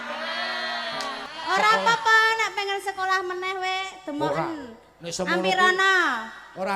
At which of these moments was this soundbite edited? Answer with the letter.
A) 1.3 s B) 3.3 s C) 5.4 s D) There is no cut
A